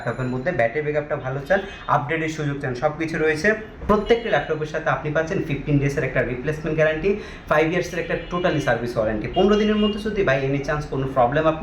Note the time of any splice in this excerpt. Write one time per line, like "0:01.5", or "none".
0:03.8